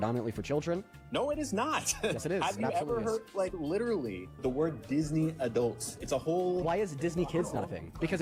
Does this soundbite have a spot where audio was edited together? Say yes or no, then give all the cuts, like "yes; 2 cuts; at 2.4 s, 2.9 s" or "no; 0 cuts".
no; 0 cuts